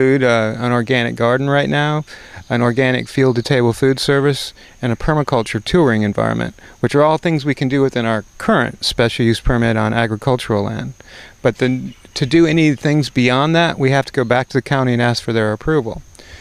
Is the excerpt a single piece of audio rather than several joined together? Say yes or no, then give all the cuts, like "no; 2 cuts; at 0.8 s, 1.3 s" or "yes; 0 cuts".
yes; 0 cuts